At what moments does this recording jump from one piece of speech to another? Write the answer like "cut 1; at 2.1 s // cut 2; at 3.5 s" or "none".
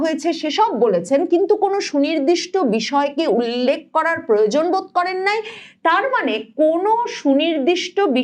none